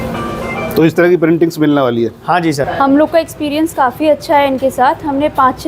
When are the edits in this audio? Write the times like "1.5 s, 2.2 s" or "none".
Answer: 2.7 s